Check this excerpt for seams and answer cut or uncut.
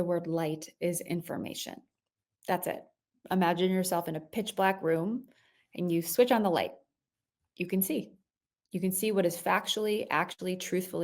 cut